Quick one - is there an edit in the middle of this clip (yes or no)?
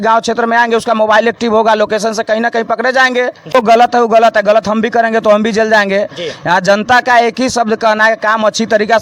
yes